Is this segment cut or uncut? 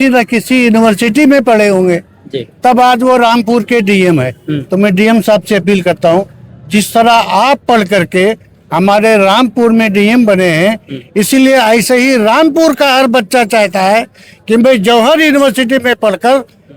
uncut